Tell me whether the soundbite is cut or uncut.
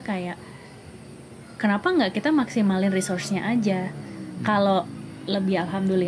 uncut